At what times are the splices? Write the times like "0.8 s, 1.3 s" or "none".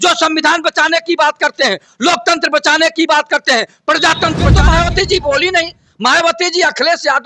4.6 s